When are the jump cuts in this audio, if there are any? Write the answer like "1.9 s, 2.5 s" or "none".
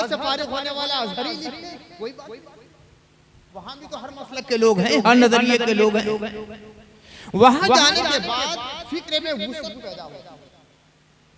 none